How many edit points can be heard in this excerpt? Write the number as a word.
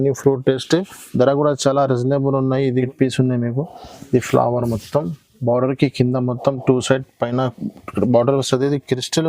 one